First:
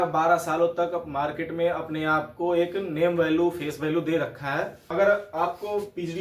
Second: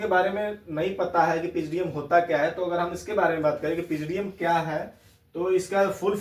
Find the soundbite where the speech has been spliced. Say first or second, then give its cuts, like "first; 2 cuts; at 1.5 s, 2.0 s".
first; 1 cut; at 4.8 s